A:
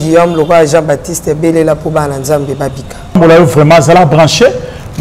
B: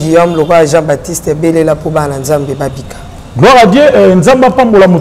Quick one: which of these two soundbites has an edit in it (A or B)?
A